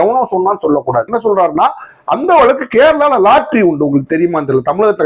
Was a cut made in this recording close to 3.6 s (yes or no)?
no